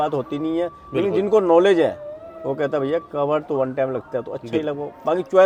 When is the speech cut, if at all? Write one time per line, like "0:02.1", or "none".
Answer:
none